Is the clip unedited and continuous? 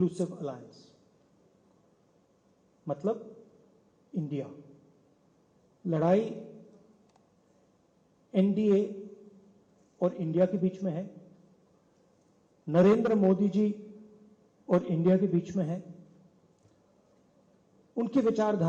yes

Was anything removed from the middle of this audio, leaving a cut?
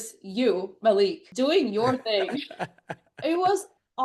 yes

